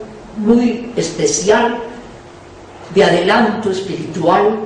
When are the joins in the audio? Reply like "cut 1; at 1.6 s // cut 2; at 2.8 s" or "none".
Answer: cut 1; at 1.1 s